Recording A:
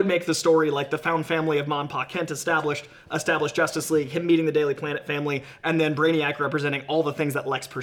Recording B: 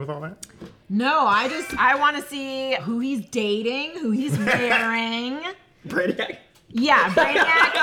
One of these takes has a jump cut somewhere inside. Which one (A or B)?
B